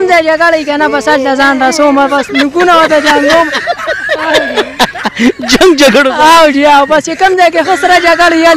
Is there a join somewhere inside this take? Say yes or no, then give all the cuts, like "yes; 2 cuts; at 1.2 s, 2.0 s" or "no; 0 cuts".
yes; 1 cut; at 3.7 s